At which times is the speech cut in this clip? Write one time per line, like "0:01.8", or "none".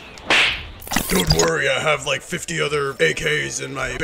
0:00.9